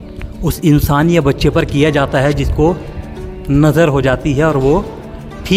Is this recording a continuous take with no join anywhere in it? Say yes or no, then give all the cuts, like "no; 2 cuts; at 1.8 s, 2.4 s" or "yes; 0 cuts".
yes; 0 cuts